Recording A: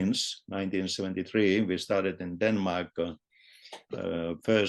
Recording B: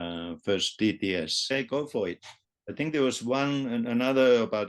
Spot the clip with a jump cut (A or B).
B